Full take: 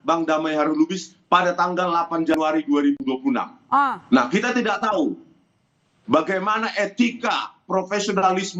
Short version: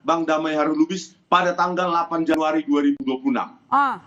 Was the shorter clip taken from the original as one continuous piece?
yes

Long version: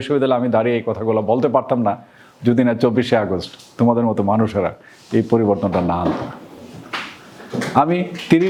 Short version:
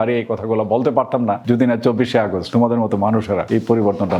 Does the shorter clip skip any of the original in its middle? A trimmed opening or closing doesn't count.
yes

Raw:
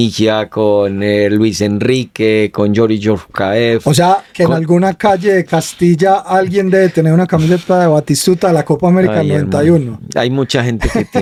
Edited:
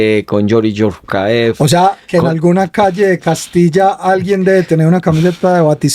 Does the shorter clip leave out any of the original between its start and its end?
no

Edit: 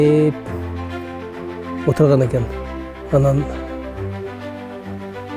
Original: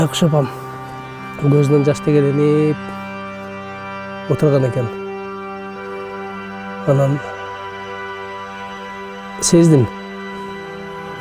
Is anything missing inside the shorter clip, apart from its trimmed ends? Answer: yes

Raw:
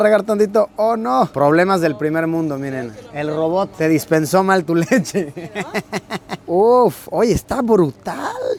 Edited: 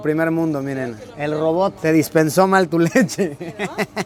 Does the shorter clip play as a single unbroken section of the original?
yes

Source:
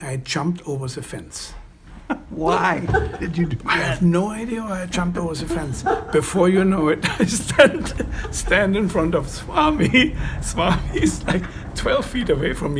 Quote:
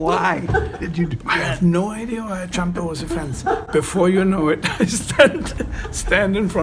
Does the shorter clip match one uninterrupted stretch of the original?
yes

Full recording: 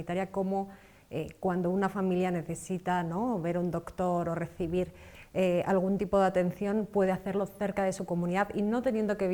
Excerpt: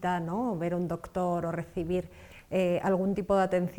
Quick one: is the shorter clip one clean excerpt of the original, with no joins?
yes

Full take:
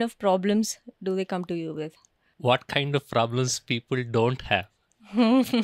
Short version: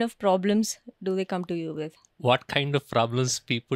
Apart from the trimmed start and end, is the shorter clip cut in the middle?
yes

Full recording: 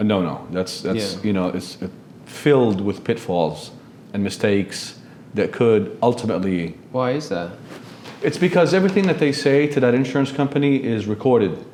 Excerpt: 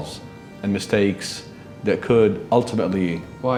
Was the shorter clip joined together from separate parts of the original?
no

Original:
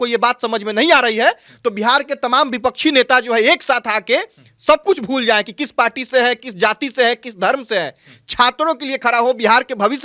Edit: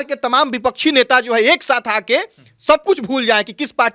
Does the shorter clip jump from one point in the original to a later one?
no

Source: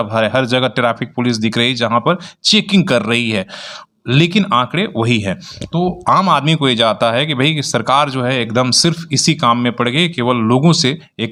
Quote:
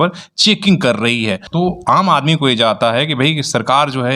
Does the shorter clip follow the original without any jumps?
no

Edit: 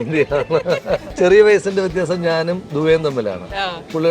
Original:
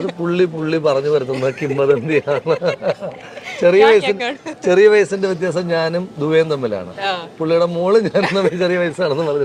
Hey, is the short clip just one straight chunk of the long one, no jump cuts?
no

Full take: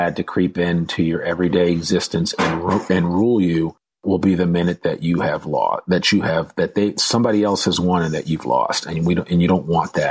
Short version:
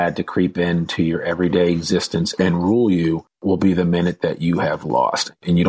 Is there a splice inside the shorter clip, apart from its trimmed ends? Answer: yes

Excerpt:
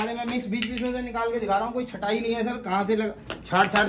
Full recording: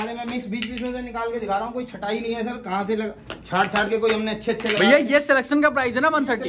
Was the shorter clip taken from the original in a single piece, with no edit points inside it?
yes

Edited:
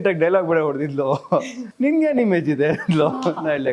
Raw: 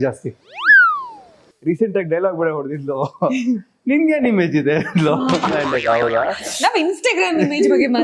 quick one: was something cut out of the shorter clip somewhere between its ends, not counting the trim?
yes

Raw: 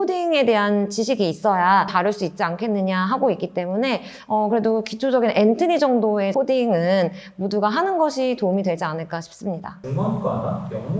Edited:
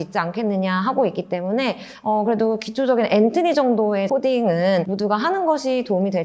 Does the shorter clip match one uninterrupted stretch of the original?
no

